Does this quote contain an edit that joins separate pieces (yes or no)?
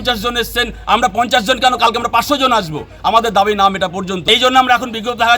yes